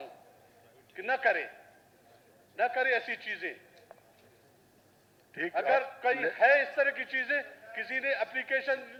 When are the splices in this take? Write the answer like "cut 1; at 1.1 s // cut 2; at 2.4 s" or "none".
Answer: none